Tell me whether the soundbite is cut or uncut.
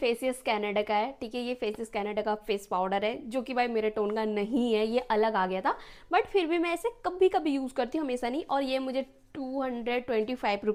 uncut